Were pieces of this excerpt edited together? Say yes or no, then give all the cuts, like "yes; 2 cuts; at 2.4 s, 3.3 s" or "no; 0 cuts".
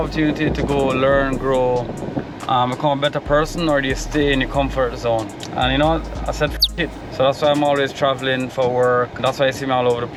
no; 0 cuts